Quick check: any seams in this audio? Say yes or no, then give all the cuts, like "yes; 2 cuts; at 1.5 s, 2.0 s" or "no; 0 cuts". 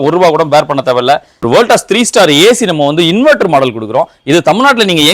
yes; 1 cut; at 1.3 s